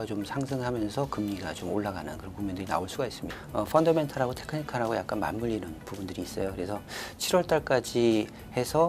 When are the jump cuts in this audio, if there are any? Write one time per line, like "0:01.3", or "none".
0:03.3